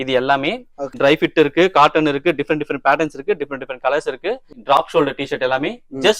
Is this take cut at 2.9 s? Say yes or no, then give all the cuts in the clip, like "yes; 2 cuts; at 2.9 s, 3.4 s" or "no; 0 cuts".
no; 2 cuts; at 1.0 s, 4.5 s